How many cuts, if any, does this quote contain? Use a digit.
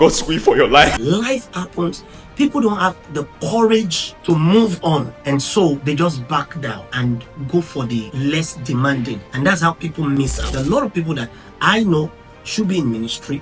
8